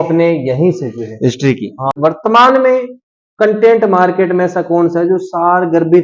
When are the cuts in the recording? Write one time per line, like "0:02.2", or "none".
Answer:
0:02.0

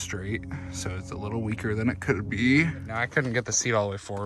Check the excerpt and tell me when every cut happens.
0:03.0

